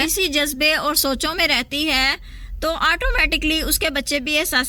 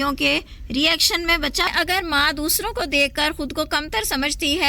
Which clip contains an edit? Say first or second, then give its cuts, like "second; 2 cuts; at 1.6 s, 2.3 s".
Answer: second; 1 cut; at 1.7 s